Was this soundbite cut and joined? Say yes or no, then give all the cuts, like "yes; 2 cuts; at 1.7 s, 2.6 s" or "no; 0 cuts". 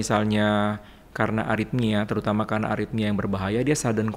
no; 0 cuts